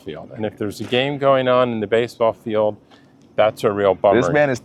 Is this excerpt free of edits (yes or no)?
yes